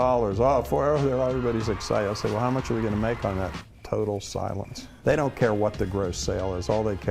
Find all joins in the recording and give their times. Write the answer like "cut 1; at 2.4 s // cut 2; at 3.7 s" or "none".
cut 1; at 4.9 s